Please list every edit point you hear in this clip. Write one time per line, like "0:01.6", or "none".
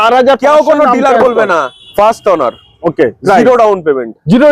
0:01.8